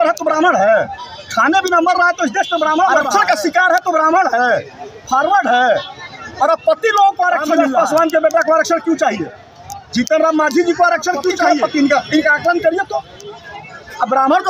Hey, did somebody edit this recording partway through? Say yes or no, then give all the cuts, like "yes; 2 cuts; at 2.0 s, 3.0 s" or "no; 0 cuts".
yes; 3 cuts; at 3.0 s, 7.6 s, 11.4 s